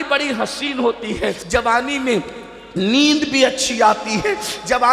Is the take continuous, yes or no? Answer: no